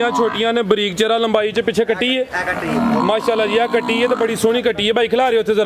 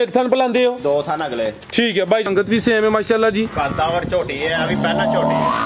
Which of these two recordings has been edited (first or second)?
second